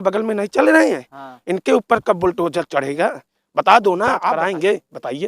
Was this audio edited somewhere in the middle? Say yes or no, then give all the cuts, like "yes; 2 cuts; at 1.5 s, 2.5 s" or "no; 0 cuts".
yes; 1 cut; at 4.2 s